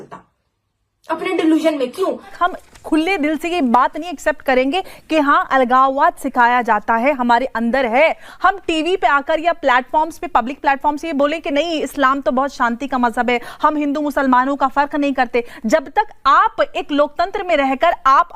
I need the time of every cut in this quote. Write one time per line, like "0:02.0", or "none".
0:02.3